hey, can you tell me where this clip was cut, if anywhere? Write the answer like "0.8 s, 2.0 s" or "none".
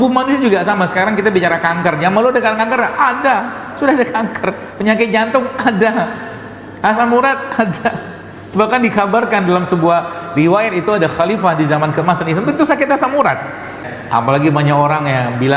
13.9 s